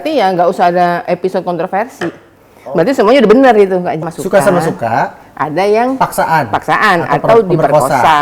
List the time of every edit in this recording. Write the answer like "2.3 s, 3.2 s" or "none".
4.0 s